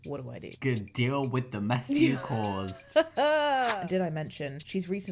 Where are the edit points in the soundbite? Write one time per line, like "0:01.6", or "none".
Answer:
0:03.8